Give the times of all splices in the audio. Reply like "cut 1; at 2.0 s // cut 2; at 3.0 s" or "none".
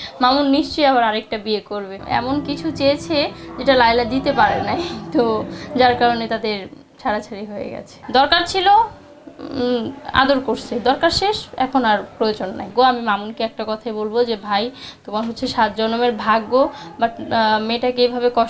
cut 1; at 1.9 s // cut 2; at 7.9 s // cut 3; at 12.7 s